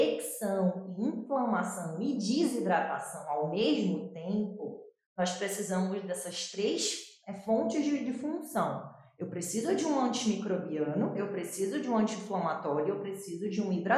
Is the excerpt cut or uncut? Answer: uncut